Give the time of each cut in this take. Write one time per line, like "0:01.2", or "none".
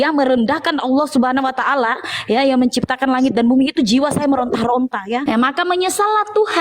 0:05.2